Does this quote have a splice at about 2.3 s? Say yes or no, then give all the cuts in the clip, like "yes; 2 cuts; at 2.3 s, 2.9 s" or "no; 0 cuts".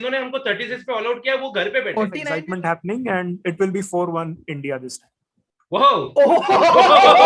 yes; 1 cut; at 2.3 s